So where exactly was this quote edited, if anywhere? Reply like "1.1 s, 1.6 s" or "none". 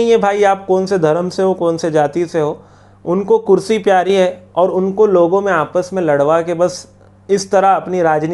none

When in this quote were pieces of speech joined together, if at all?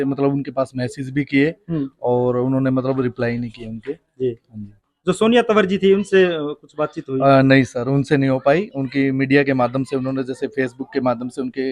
none

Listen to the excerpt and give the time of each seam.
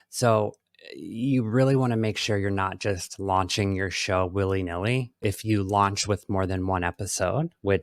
5.2 s

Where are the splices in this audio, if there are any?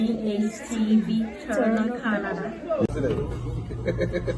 none

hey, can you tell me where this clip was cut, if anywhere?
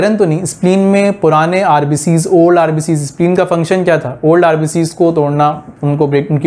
none

